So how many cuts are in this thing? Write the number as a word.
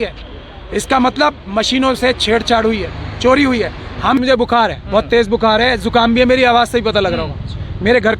one